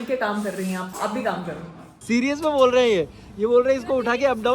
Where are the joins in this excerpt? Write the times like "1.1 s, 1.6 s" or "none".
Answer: 2.0 s

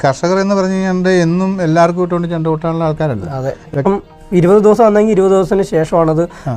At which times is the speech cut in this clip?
3.8 s

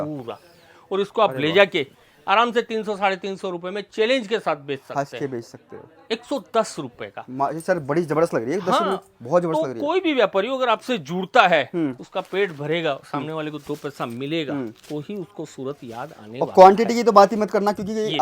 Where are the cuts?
none

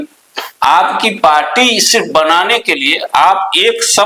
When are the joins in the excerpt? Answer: none

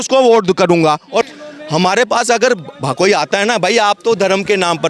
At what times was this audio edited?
1.3 s

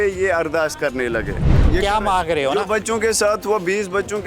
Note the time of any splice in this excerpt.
1.6 s

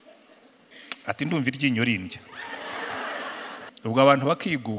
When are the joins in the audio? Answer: 3.7 s

